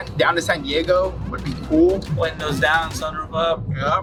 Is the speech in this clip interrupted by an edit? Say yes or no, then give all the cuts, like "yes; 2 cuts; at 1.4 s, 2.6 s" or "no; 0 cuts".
no; 0 cuts